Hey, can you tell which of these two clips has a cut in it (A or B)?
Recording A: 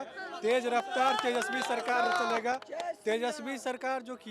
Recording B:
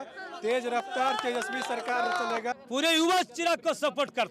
B